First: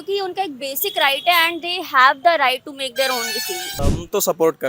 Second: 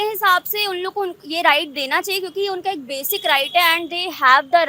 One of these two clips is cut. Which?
first; 1 cut; at 3.7 s

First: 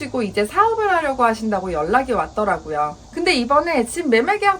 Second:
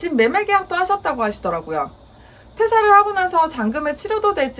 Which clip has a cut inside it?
first; 1 cut; at 3.0 s

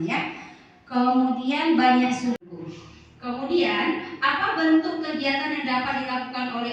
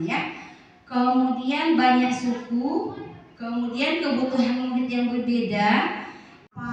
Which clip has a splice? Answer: first; 1 cut; at 2.4 s

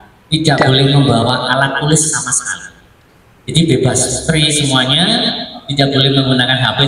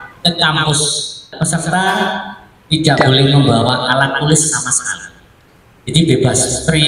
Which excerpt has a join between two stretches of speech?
second; 1 cut; at 1.3 s

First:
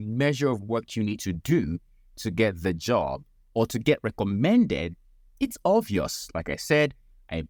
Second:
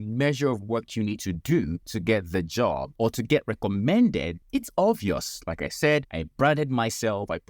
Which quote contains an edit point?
second; 4 cuts; at 1.9 s, 2.9 s, 4.4 s, 6.2 s

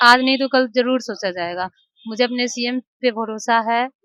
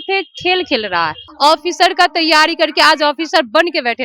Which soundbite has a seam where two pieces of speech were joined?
second; 1 cut; at 1.2 s

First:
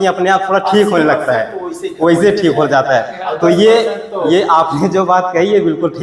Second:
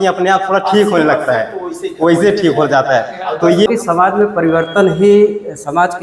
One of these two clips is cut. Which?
second; 1 cut; at 3.7 s

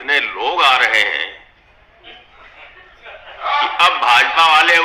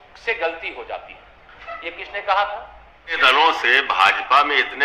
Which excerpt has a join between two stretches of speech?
second; 1 cut; at 3.2 s

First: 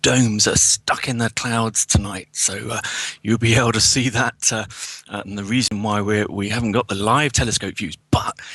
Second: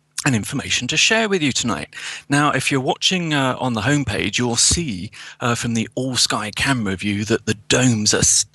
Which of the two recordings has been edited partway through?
first; 1 cut; at 7.3 s

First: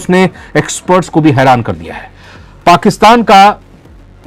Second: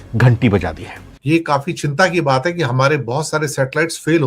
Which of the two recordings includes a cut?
second; 1 cut; at 1.1 s

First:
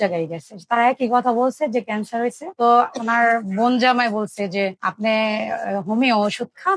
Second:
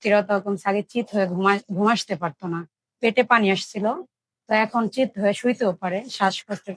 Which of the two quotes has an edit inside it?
first; 1 cut; at 2.4 s

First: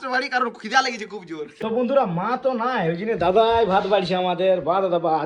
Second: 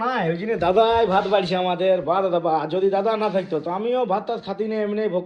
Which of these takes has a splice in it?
first; 1 cut; at 1.5 s

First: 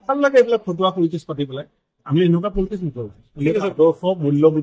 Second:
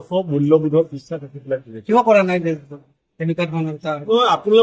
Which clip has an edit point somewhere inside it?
second; 1 cut; at 1.9 s

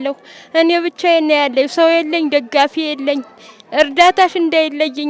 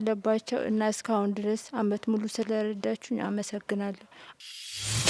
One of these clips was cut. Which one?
second; 1 cut; at 4.2 s

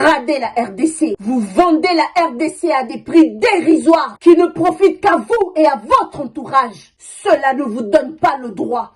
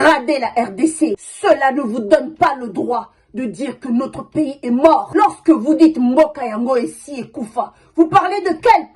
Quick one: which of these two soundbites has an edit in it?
second; 1 cut; at 1.2 s

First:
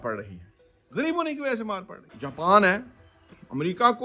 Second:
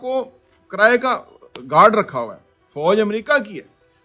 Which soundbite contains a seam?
first; 1 cut; at 2.2 s

